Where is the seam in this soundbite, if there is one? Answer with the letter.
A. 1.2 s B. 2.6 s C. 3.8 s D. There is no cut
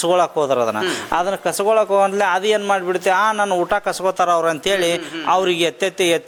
D